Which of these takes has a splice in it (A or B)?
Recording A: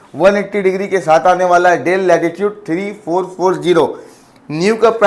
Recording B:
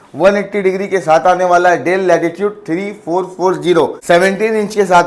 B